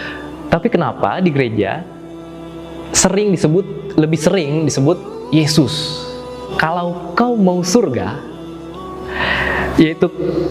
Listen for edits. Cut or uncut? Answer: cut